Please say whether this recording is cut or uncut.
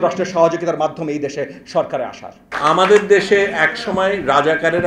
cut